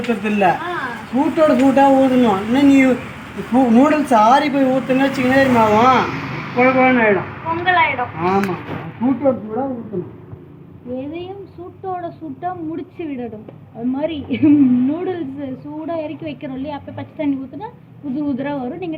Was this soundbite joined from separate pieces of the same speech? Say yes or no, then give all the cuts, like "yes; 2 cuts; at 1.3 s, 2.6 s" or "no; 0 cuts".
no; 0 cuts